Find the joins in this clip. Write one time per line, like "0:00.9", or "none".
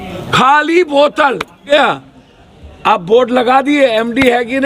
0:01.7